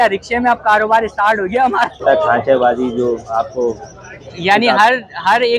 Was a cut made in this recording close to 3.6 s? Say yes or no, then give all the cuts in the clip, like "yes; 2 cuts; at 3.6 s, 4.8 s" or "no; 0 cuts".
no; 1 cut; at 2.0 s